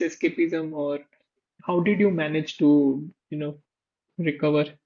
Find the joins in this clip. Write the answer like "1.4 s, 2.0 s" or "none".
none